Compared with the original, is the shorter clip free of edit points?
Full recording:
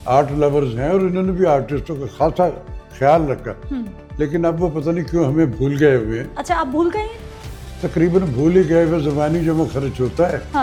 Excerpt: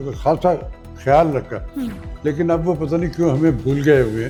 yes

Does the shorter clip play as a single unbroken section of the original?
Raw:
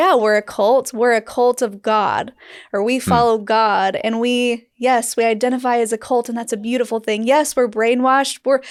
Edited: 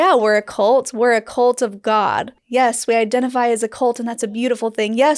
no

